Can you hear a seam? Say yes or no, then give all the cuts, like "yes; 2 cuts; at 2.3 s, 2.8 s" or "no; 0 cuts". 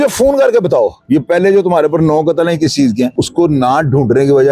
yes; 2 cuts; at 1.0 s, 3.2 s